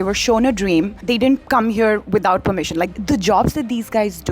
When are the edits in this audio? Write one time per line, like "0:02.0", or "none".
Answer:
0:01.2
0:02.9